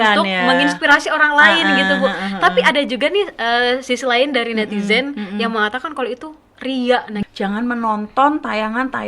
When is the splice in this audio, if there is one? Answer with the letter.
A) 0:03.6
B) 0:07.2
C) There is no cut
B